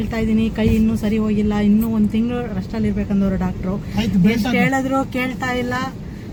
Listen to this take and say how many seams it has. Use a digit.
0